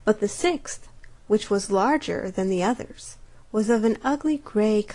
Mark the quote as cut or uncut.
cut